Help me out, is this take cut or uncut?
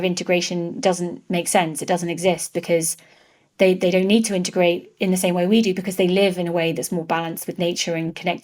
uncut